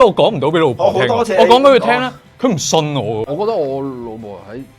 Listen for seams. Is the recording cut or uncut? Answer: cut